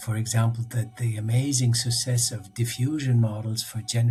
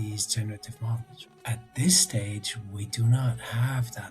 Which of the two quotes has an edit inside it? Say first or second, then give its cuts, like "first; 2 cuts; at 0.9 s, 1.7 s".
second; 1 cut; at 1.3 s